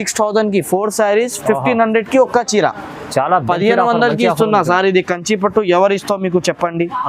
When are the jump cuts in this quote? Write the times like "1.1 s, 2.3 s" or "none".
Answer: none